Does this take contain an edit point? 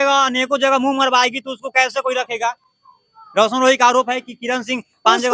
no; 0 cuts

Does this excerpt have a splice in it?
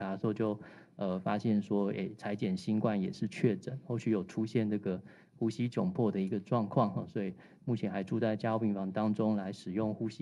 no; 0 cuts

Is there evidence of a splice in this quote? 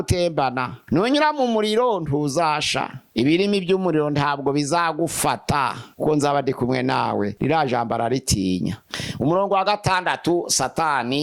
yes; 3 cuts; at 5.8 s, 7.3 s, 8.9 s

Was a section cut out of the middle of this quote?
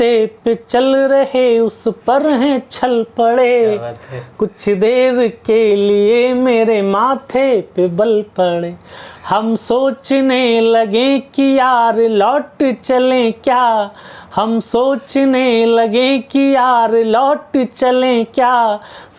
no; 0 cuts

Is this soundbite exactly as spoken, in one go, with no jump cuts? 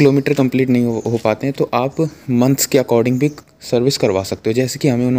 yes; 0 cuts

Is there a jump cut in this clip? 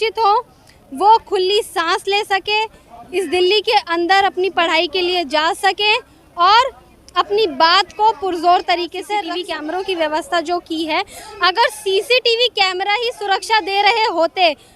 yes; 1 cut; at 9.4 s

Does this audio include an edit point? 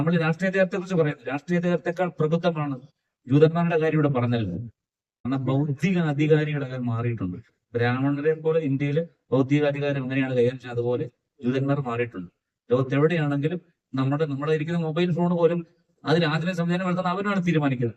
yes; 1 cut; at 5.2 s

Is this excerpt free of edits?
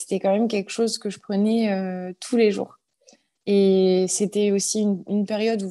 yes; 0 cuts

